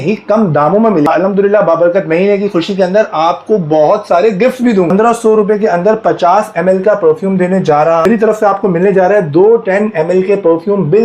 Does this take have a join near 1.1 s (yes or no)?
yes